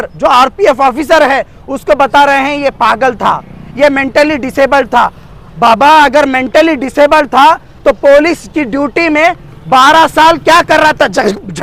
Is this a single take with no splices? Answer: yes; 0 cuts

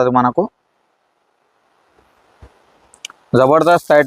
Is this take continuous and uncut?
yes; 0 cuts

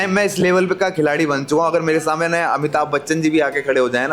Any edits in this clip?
no; 0 cuts

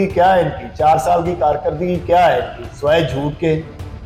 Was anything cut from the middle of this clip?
no; 0 cuts

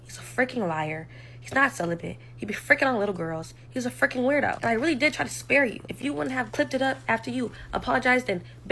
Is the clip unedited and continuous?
yes; 0 cuts

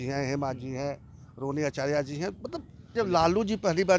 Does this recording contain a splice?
yes; 1 cut; at 2.9 s

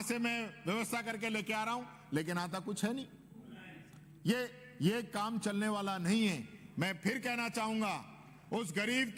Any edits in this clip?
no; 0 cuts

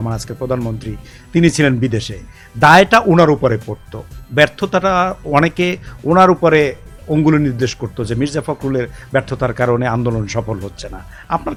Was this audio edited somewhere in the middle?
no; 0 cuts

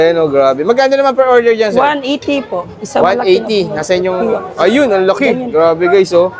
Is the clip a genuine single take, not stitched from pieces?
yes; 0 cuts

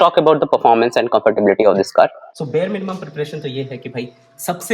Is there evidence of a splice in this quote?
yes; 1 cut; at 2.3 s

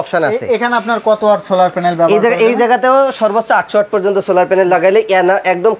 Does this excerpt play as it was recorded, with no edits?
yes; 0 cuts

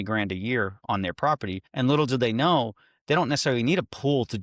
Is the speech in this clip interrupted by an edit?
yes; 1 cut; at 1.6 s

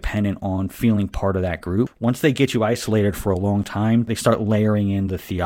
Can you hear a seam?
yes; 2 cuts; at 1.9 s, 4.1 s

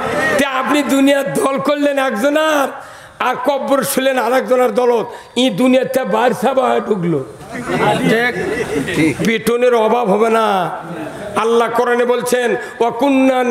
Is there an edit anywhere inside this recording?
no; 0 cuts

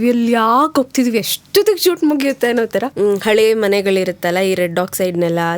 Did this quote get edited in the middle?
yes; 1 cut; at 2.9 s

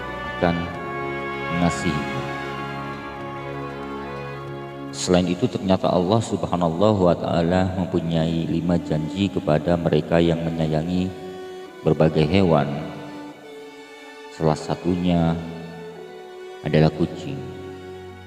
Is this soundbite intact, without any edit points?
yes; 0 cuts

